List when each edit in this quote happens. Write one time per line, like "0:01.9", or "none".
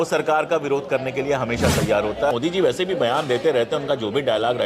0:02.3